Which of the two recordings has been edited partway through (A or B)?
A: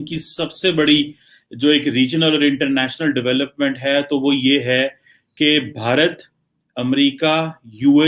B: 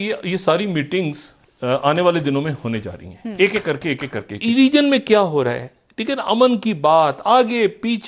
B